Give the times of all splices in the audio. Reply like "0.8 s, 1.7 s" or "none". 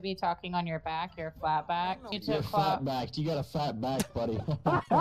2.2 s